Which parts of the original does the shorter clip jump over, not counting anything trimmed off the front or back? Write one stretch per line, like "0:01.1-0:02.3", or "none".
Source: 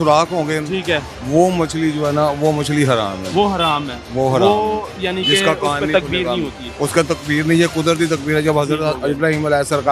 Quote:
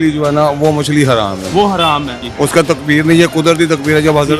0:04.0-0:06.6